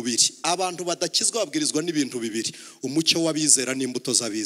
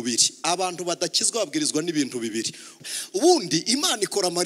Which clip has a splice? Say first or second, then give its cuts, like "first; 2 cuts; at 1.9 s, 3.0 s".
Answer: second; 1 cut; at 2.8 s